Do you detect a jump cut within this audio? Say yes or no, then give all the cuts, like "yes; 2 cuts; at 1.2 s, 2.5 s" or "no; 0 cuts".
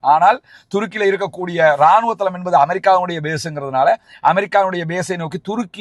no; 0 cuts